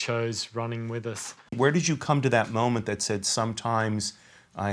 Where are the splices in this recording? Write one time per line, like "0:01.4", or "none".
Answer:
0:01.5